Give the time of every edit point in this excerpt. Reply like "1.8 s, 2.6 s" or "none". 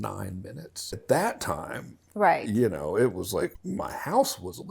1.0 s, 3.6 s